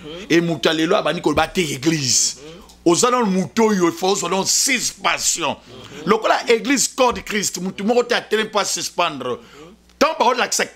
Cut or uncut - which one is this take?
uncut